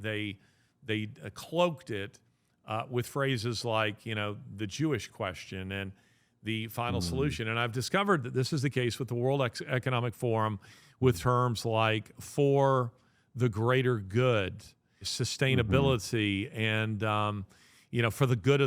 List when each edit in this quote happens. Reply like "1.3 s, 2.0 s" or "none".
15.1 s

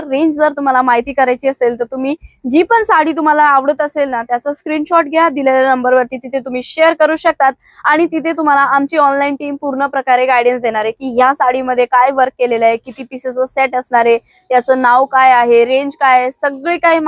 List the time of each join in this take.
none

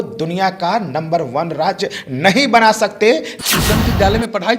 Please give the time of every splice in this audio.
3.3 s

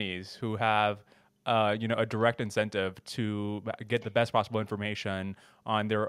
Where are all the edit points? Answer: none

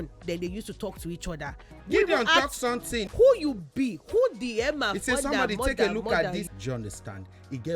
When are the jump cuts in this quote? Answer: 1.7 s, 3.0 s, 6.5 s

